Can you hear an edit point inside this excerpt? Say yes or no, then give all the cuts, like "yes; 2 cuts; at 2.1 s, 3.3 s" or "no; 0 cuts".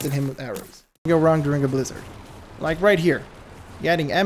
yes; 1 cut; at 1.1 s